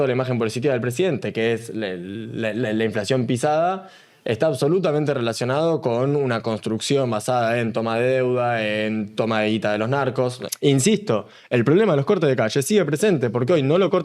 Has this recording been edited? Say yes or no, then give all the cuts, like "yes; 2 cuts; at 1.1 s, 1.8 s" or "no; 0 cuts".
yes; 1 cut; at 10.5 s